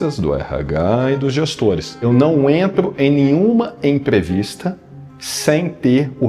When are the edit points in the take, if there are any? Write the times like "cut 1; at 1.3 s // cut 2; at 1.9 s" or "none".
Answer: cut 1; at 1.9 s